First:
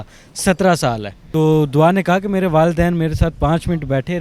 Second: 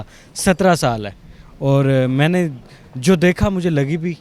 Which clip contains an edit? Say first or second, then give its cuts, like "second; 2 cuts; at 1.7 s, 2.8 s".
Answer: first; 1 cut; at 1.1 s